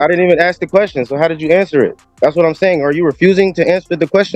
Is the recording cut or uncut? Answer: uncut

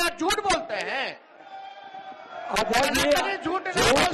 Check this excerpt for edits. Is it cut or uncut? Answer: uncut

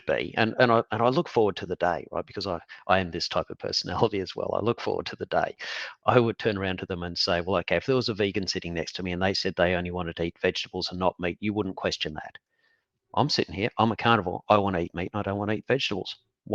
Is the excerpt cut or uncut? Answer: uncut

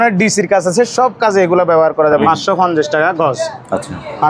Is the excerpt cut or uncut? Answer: cut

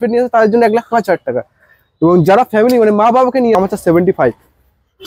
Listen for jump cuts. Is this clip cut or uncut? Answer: cut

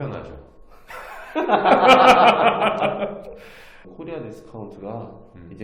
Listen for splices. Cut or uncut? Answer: cut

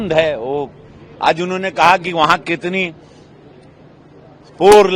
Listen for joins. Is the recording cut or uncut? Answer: uncut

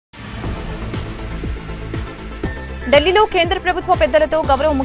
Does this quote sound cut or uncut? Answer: cut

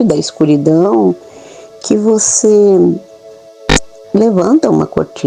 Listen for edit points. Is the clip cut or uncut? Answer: uncut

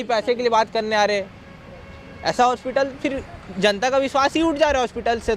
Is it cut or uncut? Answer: uncut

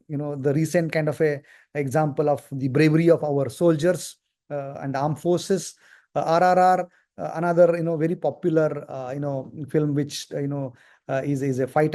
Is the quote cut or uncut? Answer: uncut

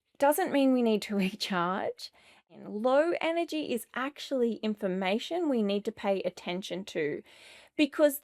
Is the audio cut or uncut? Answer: cut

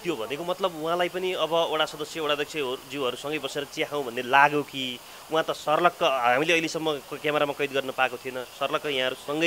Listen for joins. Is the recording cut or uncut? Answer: uncut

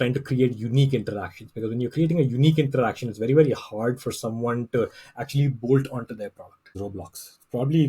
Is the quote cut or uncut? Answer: cut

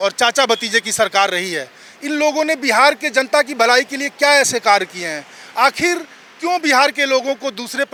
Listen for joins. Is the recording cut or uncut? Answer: uncut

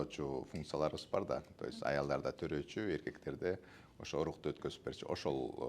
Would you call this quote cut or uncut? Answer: uncut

